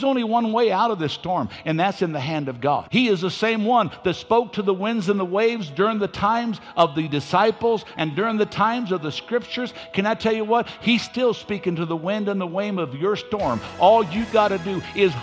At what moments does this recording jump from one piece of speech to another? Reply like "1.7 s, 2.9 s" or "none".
2.9 s